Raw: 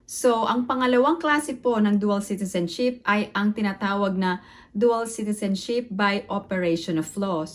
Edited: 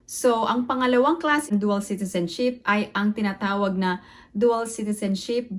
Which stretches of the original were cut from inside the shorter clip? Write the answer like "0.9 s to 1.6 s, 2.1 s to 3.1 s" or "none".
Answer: 1.5 s to 1.9 s